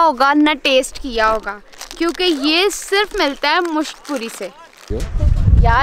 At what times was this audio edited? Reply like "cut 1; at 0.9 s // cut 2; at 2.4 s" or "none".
cut 1; at 4.9 s